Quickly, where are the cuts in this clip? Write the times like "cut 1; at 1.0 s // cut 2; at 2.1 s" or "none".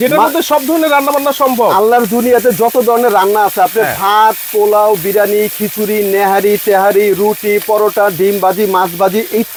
none